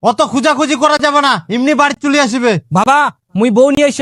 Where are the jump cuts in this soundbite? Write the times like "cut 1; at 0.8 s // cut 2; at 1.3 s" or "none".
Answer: none